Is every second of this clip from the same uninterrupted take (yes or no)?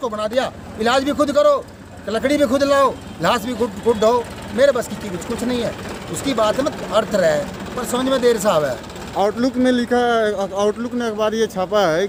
yes